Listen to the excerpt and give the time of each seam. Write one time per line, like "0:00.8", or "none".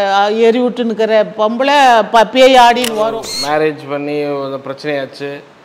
0:03.3